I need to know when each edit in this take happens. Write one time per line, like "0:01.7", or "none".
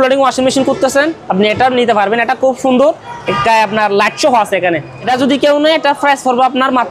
0:05.1